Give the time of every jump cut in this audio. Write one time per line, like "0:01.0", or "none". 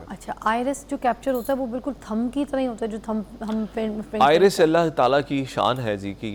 none